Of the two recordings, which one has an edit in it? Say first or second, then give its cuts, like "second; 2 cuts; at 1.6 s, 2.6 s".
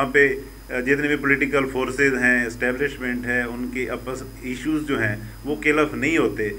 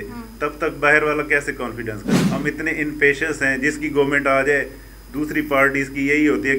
second; 1 cut; at 2.0 s